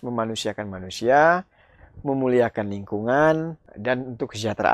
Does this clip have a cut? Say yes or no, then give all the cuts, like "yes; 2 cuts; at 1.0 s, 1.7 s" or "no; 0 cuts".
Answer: yes; 1 cut; at 3.6 s